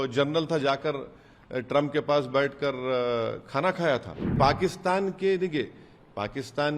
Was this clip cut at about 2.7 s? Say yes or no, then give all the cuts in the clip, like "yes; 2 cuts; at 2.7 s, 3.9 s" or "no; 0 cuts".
no; 1 cut; at 4.4 s